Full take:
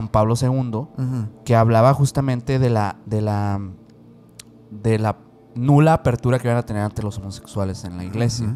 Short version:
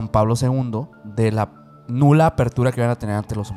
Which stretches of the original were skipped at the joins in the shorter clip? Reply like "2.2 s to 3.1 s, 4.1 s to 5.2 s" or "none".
0.9 s to 4.6 s